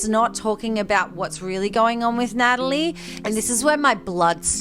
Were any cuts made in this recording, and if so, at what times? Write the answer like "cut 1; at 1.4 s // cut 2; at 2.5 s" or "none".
cut 1; at 3.1 s